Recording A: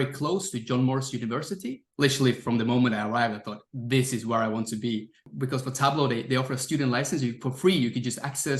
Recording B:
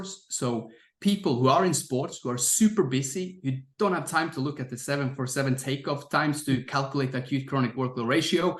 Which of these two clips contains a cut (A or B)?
A